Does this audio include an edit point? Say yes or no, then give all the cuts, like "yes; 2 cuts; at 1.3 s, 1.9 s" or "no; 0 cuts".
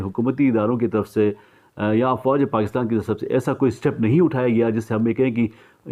no; 0 cuts